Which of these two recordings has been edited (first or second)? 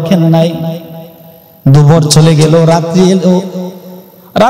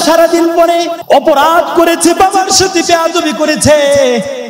second